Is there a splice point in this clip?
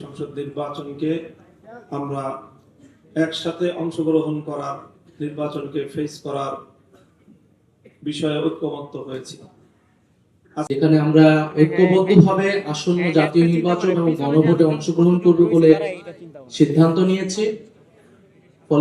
yes; 1 cut; at 10.7 s

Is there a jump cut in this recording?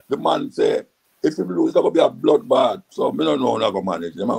yes; 2 cuts; at 1.0 s, 2.8 s

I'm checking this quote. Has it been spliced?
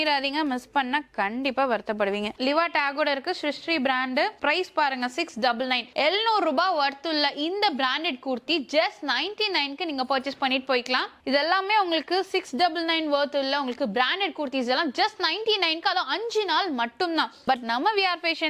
yes; 3 cuts; at 2.3 s, 11.1 s, 17.4 s

